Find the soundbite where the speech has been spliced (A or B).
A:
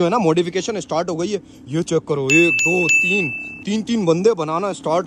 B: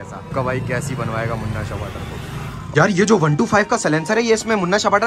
B